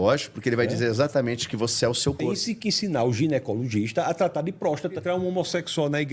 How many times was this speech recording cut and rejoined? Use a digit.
2